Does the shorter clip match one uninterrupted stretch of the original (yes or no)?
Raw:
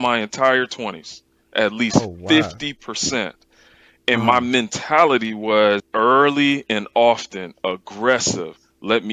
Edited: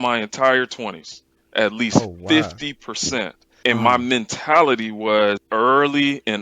no